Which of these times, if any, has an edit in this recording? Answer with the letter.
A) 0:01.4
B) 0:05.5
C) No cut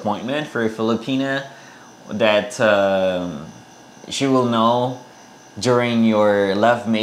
C